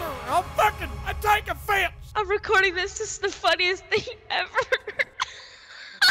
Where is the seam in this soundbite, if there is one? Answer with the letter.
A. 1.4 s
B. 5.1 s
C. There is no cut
B